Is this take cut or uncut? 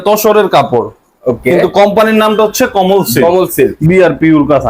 cut